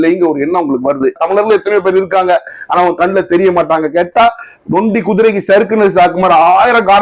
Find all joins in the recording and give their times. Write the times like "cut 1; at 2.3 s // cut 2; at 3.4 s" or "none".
cut 1; at 1.2 s